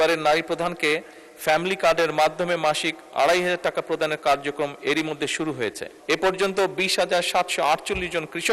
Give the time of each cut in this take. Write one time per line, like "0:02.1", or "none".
0:05.9